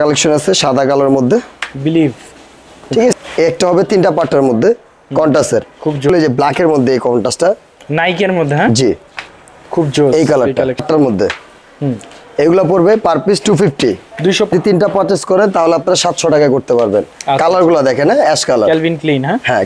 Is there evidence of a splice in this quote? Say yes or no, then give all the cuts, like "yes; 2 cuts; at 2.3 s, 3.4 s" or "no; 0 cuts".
yes; 4 cuts; at 3.2 s, 6.1 s, 10.8 s, 14.5 s